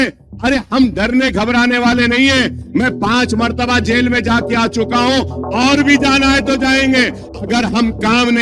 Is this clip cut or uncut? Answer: cut